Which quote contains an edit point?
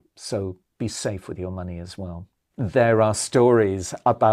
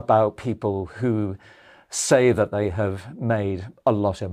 first; 1 cut; at 2.4 s

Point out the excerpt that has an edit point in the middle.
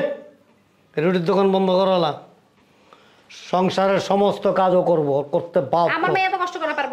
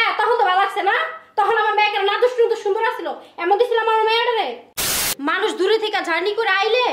second; 1 cut; at 5.1 s

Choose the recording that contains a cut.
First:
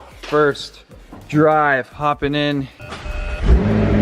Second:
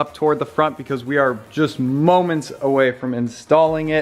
first; 1 cut; at 2.8 s

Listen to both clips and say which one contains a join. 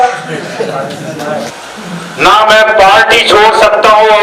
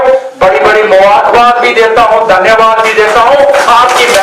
first; 1 cut; at 1.6 s

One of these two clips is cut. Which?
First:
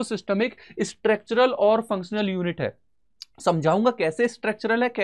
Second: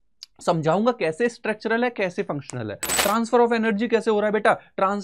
second; 1 cut; at 3.0 s

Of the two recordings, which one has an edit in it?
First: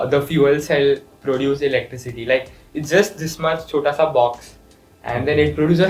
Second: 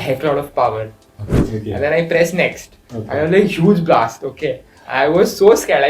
second; 1 cut; at 1.4 s

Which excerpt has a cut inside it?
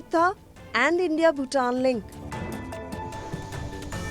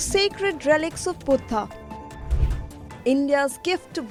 first; 1 cut; at 2.0 s

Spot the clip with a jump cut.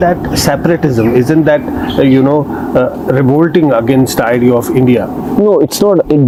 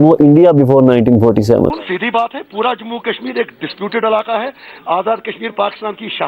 second; 1 cut; at 1.6 s

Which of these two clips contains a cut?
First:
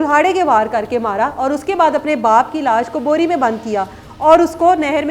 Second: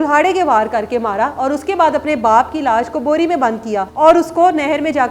second; 1 cut; at 3.9 s

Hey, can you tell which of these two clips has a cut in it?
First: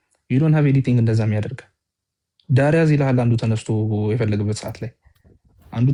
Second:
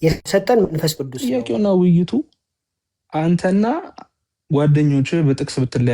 second; 1 cut; at 1.1 s

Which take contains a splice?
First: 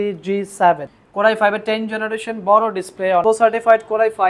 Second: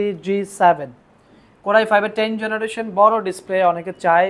first; 2 cuts; at 1.0 s, 3.2 s

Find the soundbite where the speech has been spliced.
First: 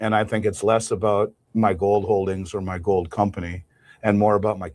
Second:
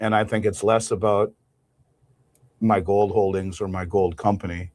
first; 1 cut; at 1.4 s

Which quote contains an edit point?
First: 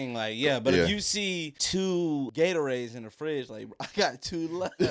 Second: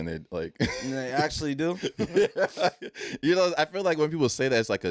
first; 2 cuts; at 1.5 s, 2.3 s

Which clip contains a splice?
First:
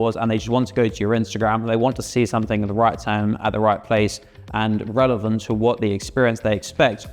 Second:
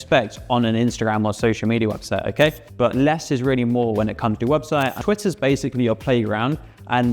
second; 2 cuts; at 2.6 s, 5.0 s

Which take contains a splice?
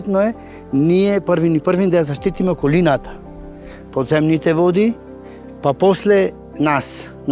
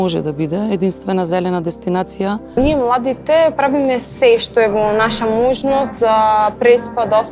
second; 1 cut; at 2.5 s

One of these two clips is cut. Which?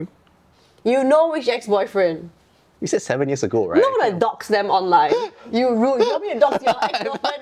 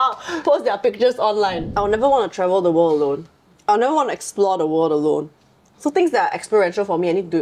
second; 1 cut; at 1.6 s

